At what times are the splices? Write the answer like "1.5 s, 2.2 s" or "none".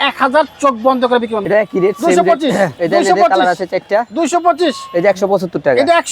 1.4 s, 2.8 s